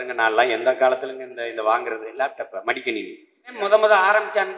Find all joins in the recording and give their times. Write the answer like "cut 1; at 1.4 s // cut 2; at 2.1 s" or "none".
cut 1; at 3.5 s